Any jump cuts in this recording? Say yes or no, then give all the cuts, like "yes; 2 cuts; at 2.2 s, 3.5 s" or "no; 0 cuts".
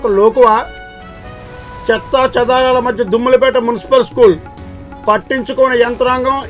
no; 0 cuts